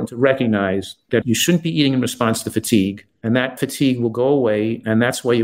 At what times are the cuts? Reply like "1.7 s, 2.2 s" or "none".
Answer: 0.9 s, 3.1 s